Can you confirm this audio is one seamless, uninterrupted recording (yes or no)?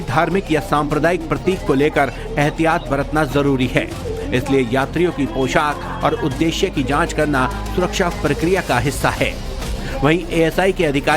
no